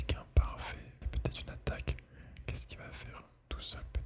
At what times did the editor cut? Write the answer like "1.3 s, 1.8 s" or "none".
1.1 s